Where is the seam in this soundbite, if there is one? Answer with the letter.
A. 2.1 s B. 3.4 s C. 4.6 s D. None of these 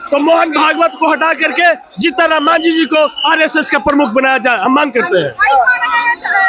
D